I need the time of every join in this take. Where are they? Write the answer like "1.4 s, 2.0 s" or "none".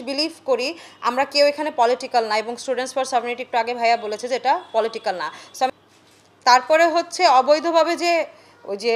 5.7 s

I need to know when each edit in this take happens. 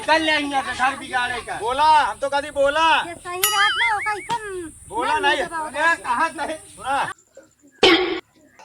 7.2 s

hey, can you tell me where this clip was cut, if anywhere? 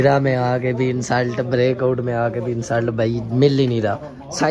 none

